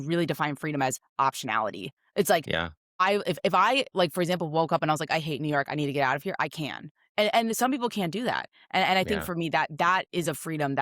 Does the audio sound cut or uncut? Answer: uncut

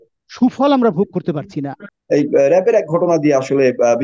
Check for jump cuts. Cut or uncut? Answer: cut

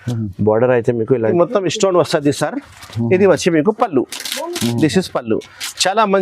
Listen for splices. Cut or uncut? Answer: cut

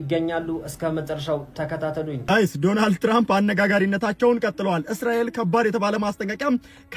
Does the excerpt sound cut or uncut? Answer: cut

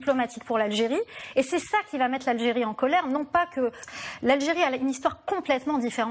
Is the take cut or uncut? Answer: cut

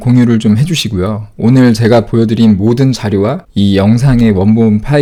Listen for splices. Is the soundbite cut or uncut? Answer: uncut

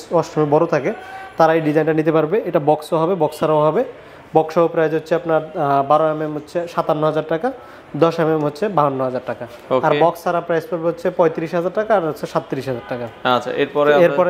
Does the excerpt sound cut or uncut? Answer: uncut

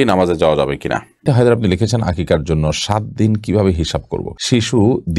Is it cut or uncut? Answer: cut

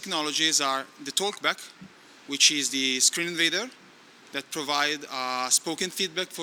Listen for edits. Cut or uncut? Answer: uncut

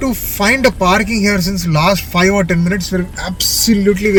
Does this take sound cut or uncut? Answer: uncut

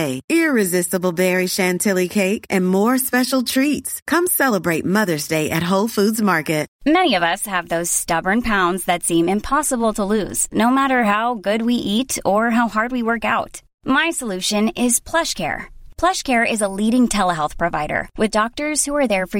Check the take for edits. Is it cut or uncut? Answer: cut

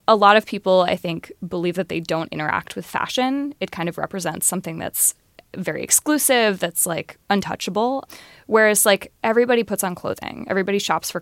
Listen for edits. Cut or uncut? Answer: uncut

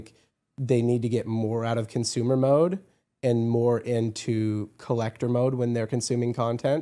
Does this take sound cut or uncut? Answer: uncut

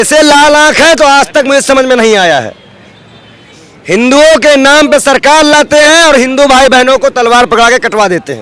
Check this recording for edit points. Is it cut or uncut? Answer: uncut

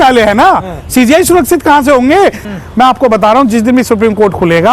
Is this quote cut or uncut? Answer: cut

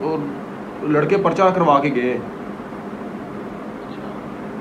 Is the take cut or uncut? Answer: uncut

